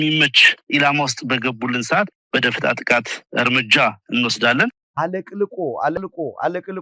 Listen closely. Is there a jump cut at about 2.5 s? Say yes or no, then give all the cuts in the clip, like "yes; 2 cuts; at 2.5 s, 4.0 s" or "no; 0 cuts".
no; 1 cut; at 4.8 s